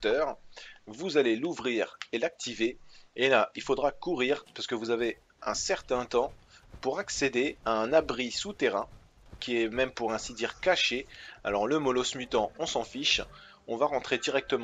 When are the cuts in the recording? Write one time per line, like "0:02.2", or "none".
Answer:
none